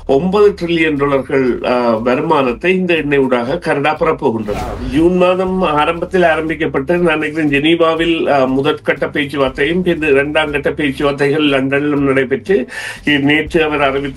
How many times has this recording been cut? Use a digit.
1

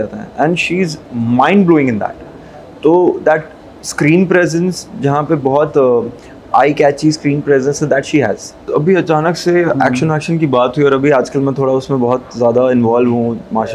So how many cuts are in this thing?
1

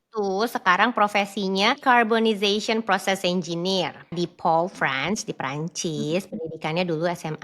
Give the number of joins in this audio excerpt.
2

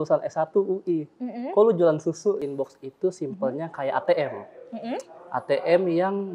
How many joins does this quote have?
1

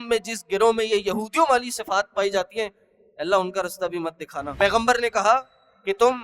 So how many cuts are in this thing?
1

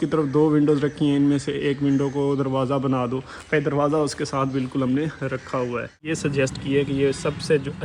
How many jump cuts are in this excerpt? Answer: 1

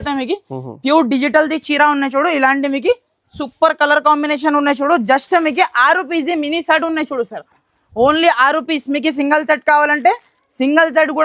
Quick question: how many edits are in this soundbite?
1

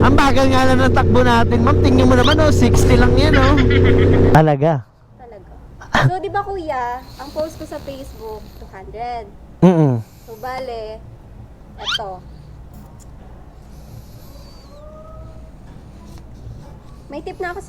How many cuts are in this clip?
1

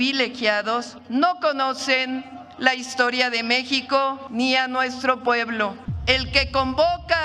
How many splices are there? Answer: 3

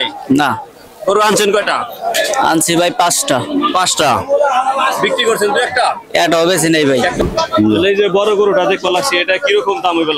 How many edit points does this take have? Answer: 1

